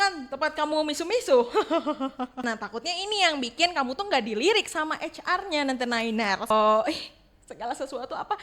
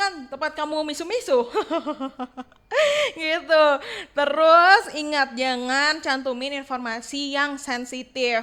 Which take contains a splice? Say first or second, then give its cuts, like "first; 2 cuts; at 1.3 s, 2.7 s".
first; 2 cuts; at 2.5 s, 6.5 s